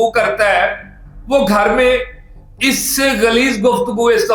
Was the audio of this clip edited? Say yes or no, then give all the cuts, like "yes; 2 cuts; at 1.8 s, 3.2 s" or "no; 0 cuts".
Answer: no; 0 cuts